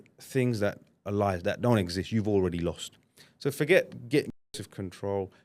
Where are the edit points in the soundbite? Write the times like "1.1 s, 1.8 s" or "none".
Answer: 4.5 s